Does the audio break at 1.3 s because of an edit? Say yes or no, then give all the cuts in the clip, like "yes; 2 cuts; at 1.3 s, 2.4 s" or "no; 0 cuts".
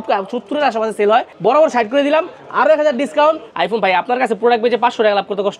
yes; 2 cuts; at 1.3 s, 3.5 s